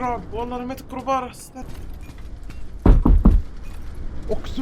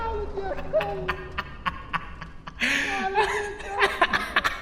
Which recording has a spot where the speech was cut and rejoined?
first; 1 cut; at 1.5 s

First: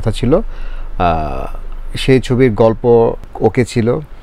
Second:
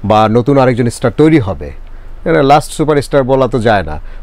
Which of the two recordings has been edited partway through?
first; 1 cut; at 3.3 s

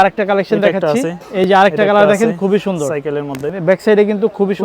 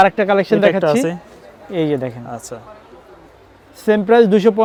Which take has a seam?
first; 2 cuts; at 1.2 s, 3.5 s

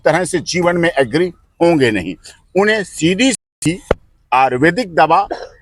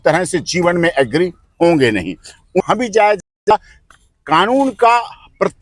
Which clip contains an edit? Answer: second; 1 cut; at 2.6 s

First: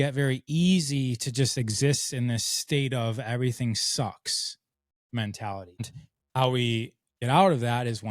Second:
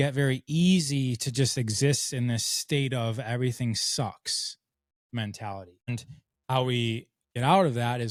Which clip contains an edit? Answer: first; 1 cut; at 5.8 s

